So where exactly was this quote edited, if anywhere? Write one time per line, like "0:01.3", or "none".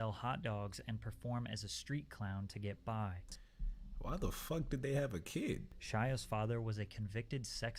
0:03.3
0:05.7